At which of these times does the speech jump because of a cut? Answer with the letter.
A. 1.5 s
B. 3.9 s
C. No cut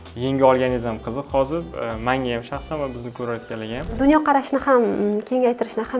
B